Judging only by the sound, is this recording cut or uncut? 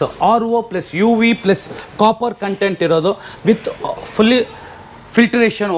uncut